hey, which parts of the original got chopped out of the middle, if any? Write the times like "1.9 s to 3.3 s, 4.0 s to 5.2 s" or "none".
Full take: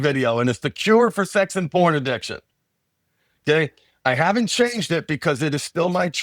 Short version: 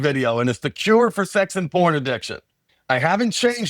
2.7 s to 3.8 s